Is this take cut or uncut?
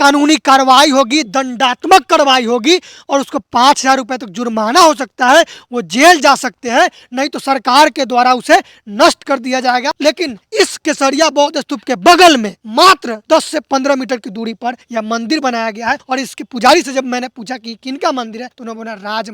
cut